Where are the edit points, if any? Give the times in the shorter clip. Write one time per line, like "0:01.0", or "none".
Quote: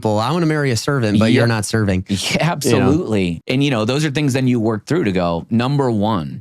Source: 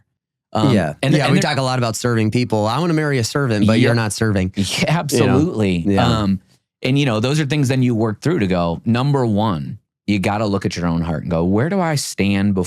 0:03.3